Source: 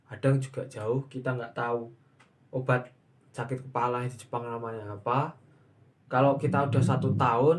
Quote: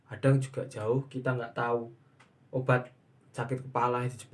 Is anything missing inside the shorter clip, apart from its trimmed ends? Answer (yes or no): no